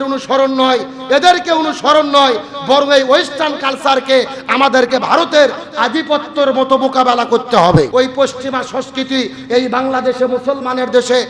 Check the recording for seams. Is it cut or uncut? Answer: cut